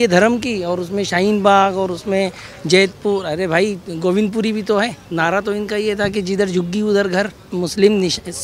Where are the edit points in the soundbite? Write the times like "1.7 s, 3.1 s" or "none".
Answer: 5.0 s, 7.5 s